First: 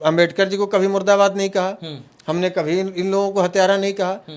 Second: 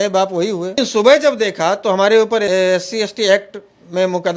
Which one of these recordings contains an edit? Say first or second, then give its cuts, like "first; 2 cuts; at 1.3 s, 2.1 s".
second; 2 cuts; at 0.7 s, 2.5 s